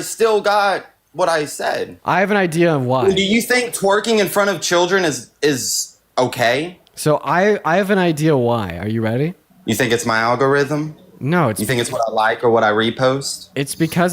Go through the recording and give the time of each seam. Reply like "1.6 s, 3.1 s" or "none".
1.9 s